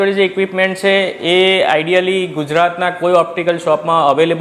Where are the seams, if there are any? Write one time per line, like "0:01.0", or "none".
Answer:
none